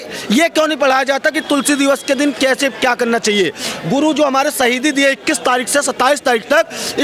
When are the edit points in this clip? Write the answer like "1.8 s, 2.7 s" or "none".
none